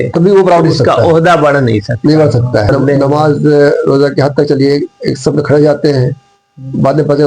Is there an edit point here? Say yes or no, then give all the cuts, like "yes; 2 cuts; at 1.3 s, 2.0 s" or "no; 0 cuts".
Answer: yes; 1 cut; at 2.7 s